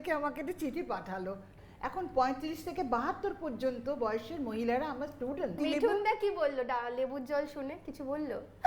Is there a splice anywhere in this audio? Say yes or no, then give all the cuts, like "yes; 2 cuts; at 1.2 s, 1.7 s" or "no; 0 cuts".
yes; 2 cuts; at 1.5 s, 5.6 s